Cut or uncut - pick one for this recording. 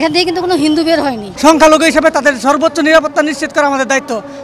cut